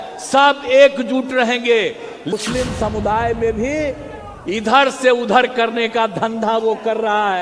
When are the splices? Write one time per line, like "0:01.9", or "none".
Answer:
0:02.3